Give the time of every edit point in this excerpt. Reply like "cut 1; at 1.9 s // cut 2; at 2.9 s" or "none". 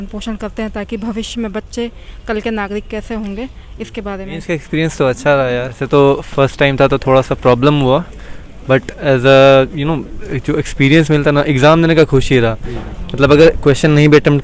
cut 1; at 4.4 s // cut 2; at 5.7 s